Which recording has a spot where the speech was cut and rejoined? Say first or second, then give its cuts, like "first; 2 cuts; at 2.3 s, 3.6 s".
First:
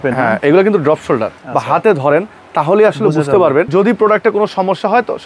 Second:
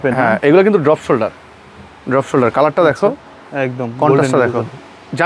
first; 2 cuts; at 1.4 s, 3.7 s